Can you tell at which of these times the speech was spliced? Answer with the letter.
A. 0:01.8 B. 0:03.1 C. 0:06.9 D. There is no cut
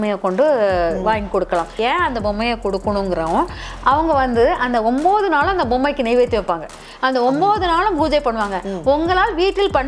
A